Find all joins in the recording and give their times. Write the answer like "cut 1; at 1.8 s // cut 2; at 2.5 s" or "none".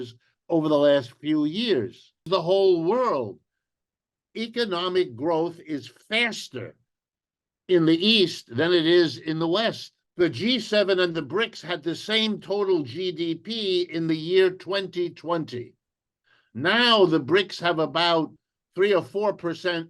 cut 1; at 2.2 s